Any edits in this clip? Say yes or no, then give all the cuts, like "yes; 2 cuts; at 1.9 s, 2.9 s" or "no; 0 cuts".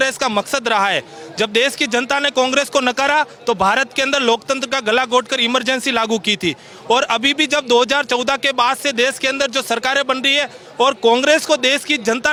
no; 0 cuts